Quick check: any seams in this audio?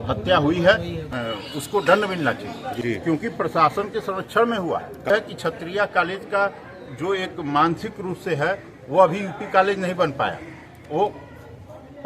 yes; 3 cuts; at 1.1 s, 2.7 s, 5.1 s

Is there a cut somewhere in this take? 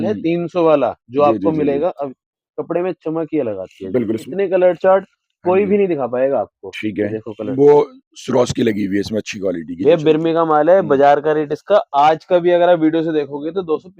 yes; 2 cuts; at 4.2 s, 7.5 s

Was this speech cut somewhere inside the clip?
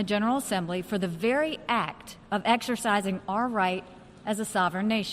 no; 0 cuts

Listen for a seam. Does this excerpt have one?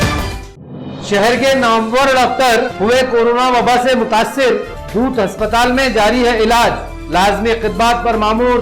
yes; 1 cut; at 0.9 s

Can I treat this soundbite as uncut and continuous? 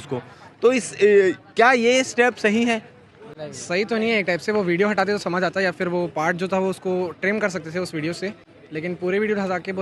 yes; 0 cuts

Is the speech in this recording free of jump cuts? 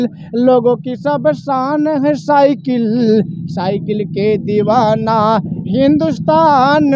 yes; 0 cuts

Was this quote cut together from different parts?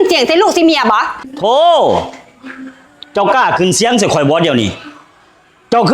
yes; 1 cut; at 1.1 s

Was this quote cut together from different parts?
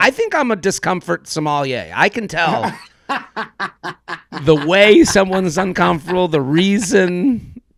no; 0 cuts

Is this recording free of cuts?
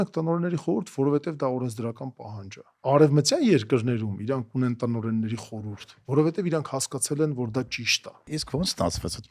no; 2 cuts; at 2.8 s, 8.3 s

